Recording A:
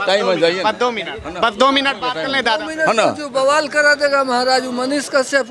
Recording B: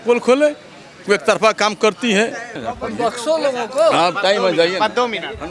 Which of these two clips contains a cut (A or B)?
B